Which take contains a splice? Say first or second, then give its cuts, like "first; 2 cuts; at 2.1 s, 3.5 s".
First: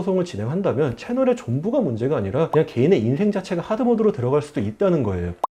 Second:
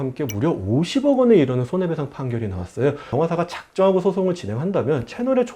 second; 1 cut; at 3.1 s